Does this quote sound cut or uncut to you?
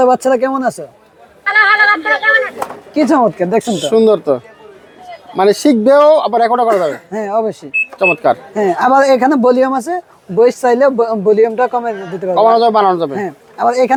uncut